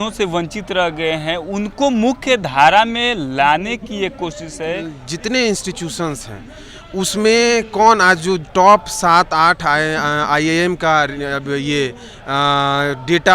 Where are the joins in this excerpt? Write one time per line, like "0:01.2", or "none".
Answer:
0:05.0